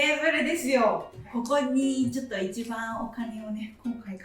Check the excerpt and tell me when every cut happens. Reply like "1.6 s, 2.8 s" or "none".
1.2 s

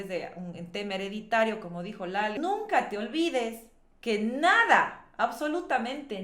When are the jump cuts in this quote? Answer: 2.4 s

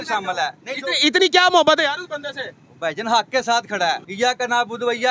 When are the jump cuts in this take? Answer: 4.1 s

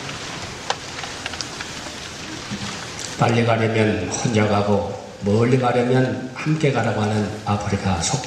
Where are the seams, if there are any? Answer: none

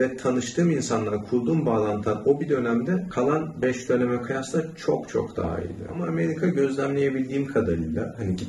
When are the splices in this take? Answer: 6.0 s

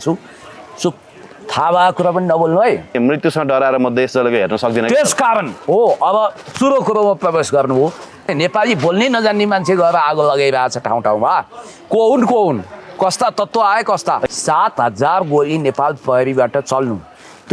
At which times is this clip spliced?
2.9 s, 8.3 s, 14.3 s

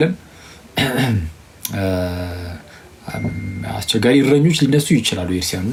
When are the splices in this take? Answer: none

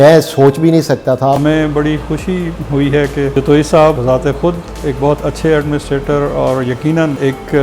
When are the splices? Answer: 1.4 s

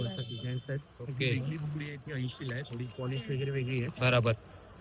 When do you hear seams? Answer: 1.3 s

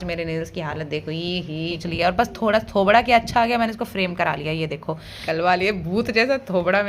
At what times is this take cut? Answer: 1.8 s, 5.2 s

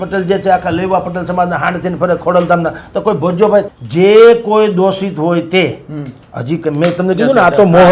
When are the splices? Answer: 3.7 s

